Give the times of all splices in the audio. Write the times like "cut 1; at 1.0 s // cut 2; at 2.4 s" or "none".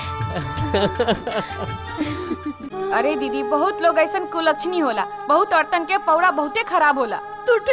cut 1; at 2.6 s